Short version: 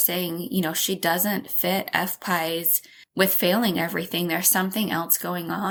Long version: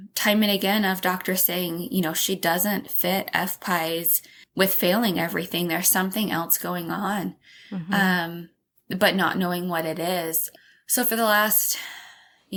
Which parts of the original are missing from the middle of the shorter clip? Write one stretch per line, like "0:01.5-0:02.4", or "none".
none